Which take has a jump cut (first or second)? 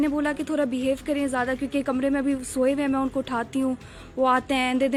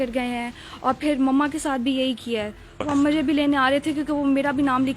second